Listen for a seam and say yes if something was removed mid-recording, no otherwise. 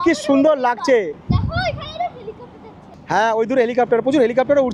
no